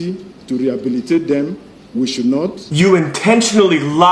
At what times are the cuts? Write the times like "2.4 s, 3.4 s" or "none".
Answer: 2.6 s